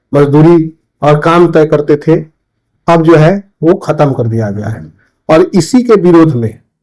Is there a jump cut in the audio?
no; 0 cuts

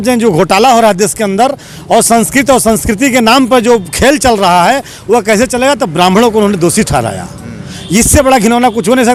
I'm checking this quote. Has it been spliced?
no; 0 cuts

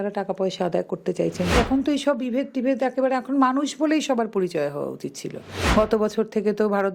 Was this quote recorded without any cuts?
no; 2 cuts; at 1.5 s, 5.6 s

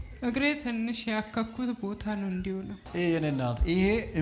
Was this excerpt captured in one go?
no; 1 cut; at 2.8 s

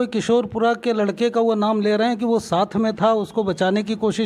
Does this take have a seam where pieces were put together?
no; 0 cuts

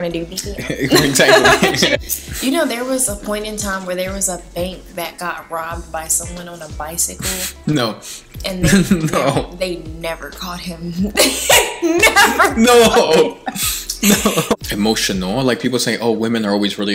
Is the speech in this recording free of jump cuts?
no; 2 cuts; at 1.9 s, 14.6 s

